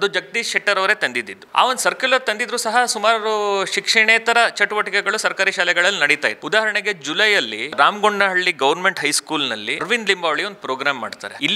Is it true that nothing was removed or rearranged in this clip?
yes; 0 cuts

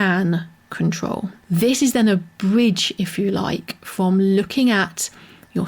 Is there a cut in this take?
yes; 1 cut; at 1.3 s

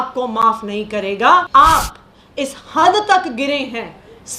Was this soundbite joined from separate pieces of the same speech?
yes; 1 cut; at 1.5 s

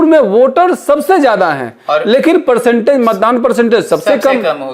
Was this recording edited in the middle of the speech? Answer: no; 0 cuts

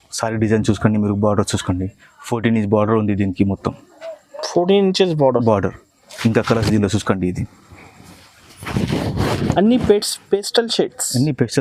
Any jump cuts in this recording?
no; 0 cuts

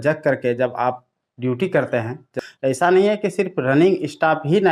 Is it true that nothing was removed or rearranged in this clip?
no; 1 cut; at 2.2 s

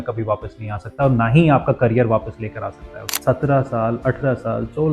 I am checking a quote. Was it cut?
yes; 1 cut; at 3.2 s

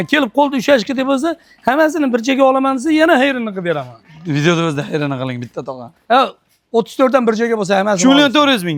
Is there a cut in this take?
no; 0 cuts

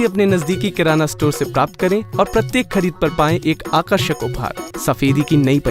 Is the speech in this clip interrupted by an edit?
yes; 1 cut; at 4.6 s

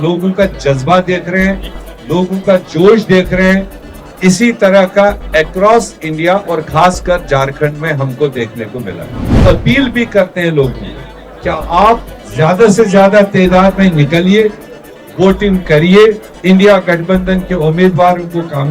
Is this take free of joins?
no; 1 cut; at 9.4 s

